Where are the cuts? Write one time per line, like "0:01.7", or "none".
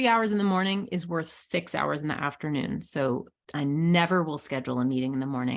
none